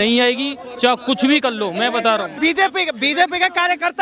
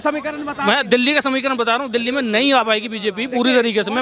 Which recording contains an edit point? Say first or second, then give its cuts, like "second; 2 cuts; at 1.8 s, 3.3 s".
first; 1 cut; at 2.3 s